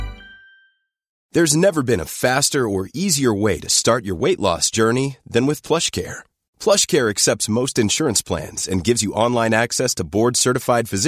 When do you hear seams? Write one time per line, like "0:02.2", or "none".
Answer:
0:01.1